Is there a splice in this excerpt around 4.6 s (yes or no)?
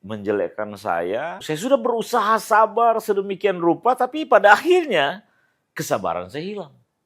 no